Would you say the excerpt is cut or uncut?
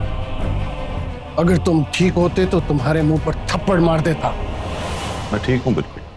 cut